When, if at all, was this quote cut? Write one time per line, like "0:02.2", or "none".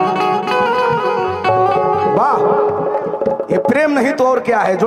none